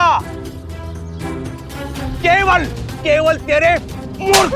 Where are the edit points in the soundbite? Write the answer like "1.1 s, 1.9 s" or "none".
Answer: 2.2 s

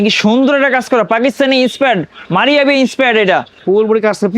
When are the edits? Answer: none

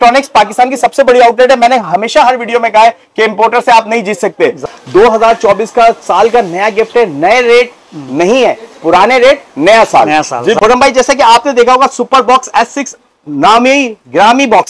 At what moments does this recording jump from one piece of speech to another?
4.6 s, 10.6 s

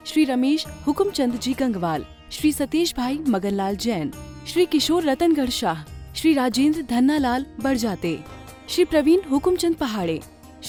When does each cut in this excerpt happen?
none

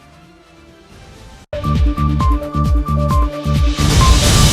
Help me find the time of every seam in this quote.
1.5 s

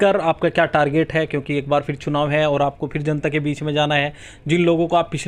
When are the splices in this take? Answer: none

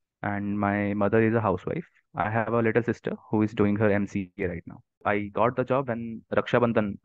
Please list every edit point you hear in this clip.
5.0 s

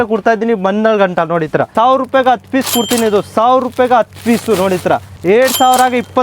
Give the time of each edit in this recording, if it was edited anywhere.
1.7 s, 5.1 s

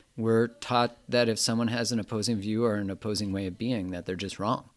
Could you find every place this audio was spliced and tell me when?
none

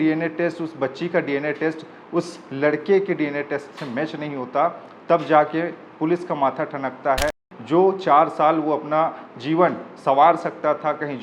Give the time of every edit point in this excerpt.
7.5 s

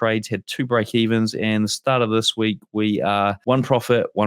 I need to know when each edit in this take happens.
3.4 s

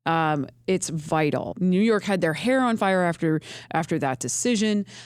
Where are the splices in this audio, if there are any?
1.5 s

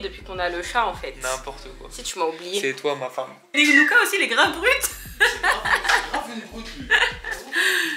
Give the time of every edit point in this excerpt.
3.5 s

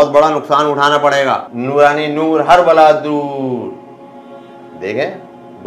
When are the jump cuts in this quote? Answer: 1.5 s

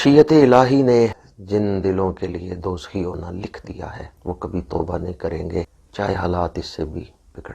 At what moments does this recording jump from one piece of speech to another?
1.3 s, 4.1 s, 5.8 s

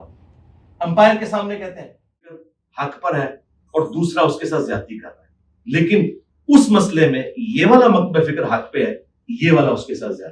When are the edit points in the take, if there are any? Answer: 2.2 s

